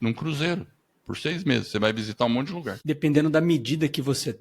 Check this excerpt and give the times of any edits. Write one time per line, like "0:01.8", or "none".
0:02.7